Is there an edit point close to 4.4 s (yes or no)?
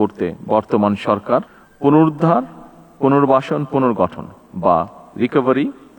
no